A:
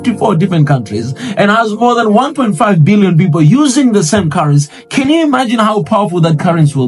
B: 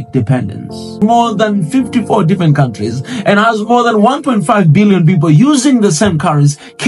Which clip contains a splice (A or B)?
B